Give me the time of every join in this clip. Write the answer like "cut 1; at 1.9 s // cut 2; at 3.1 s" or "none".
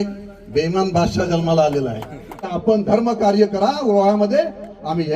cut 1; at 2.5 s